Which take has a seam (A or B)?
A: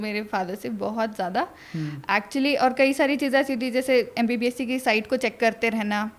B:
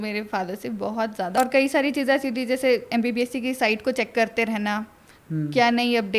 B